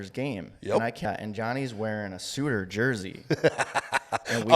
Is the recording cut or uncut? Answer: cut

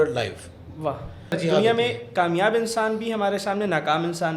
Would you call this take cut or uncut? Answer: cut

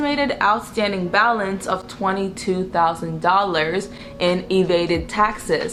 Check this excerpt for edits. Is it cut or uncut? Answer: uncut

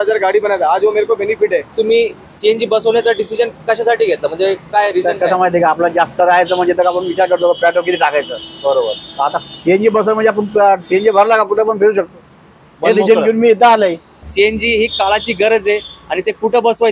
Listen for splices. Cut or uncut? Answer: cut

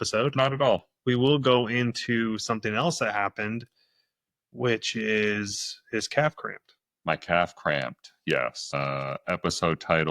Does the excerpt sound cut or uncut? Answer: cut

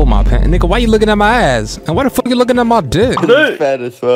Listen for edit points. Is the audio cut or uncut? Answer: cut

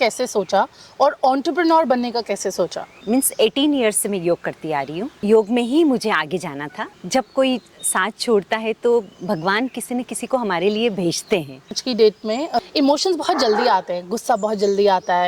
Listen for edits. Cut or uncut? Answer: cut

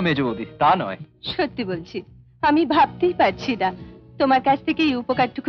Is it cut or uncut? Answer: uncut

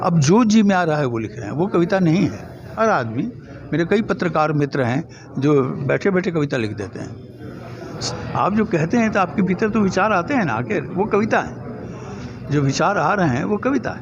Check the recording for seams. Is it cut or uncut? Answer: cut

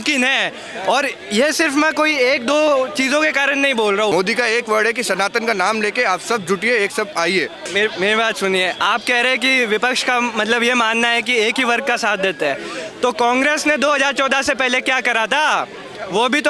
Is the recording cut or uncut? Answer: cut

